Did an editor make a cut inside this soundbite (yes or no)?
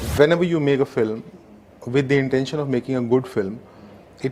no